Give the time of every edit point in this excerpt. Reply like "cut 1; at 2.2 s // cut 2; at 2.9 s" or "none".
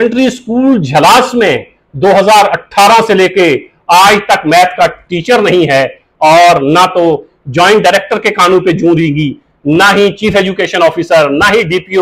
none